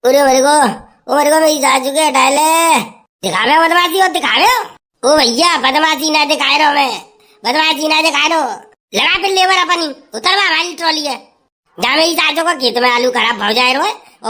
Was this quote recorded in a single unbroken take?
yes; 0 cuts

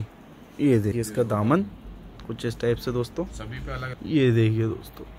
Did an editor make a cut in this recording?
yes; 2 cuts; at 0.9 s, 3.9 s

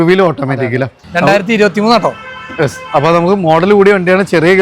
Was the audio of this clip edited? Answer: yes; 1 cut; at 1.0 s

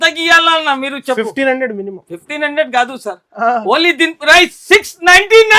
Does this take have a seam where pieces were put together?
no; 0 cuts

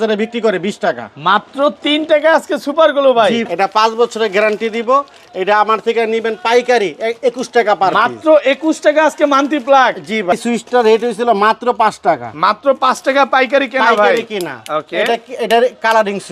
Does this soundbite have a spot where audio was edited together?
yes; 2 cuts; at 3.5 s, 10.3 s

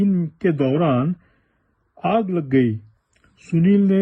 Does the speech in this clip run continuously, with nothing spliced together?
yes; 0 cuts

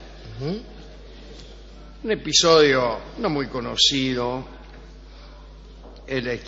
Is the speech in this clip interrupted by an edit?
no; 0 cuts

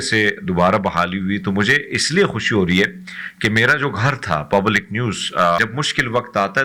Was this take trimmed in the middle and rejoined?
yes; 1 cut; at 5.6 s

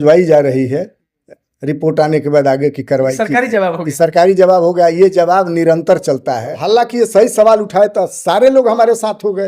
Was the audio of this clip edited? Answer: yes; 1 cut; at 6.6 s

